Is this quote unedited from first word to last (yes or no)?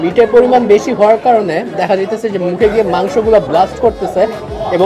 yes